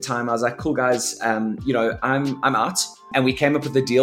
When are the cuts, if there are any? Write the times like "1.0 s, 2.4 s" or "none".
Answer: 3.1 s